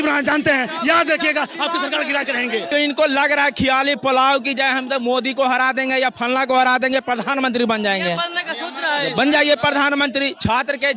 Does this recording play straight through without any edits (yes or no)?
no